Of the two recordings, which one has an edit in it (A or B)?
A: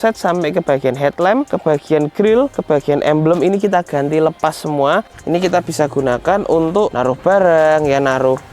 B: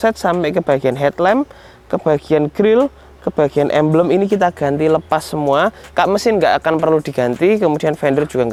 A